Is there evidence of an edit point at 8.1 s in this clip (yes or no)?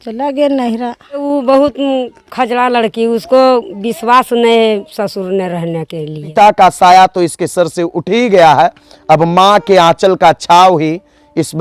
no